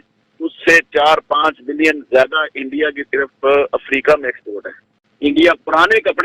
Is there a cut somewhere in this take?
yes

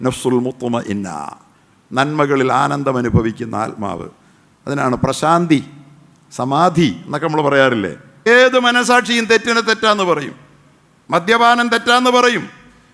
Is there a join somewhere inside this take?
yes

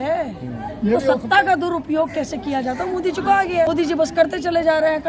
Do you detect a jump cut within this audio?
yes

